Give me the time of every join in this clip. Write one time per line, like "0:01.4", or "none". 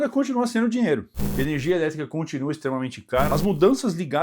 0:01.1
0:03.3